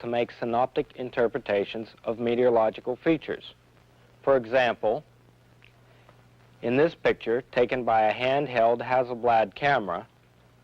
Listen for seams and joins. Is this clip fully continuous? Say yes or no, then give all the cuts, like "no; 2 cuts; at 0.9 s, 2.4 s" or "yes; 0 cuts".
no; 1 cut; at 9.5 s